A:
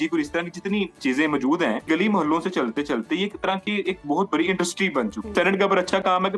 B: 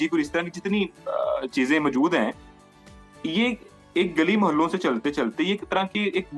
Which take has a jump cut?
A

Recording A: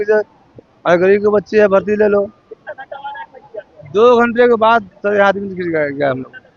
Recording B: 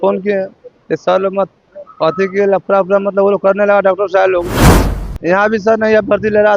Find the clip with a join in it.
B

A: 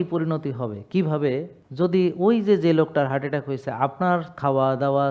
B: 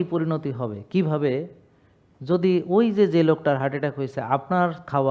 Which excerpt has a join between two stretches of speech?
A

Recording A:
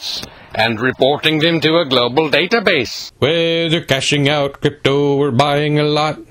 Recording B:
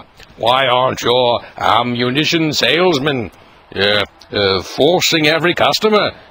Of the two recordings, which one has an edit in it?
A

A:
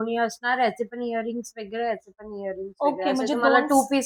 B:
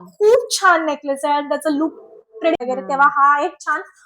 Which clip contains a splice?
B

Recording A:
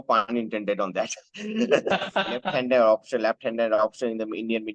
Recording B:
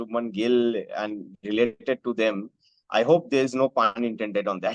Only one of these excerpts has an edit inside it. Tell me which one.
A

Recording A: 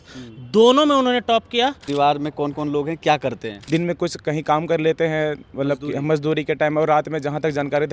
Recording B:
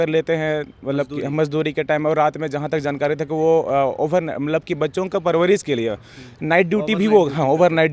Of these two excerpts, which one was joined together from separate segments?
A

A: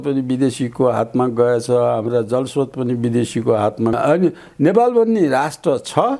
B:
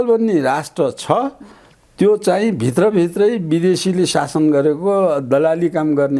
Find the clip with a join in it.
A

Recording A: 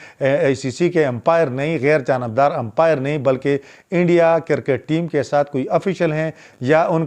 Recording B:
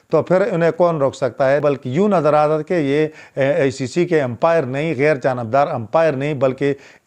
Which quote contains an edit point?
B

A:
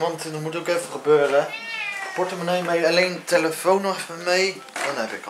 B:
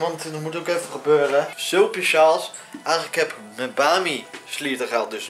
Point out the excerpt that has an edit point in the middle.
B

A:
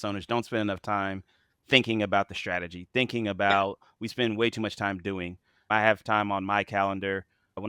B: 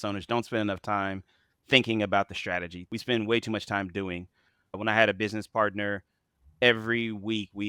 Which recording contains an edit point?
B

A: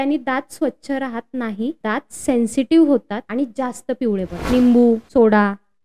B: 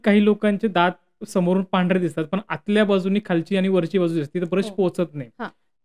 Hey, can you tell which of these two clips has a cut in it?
A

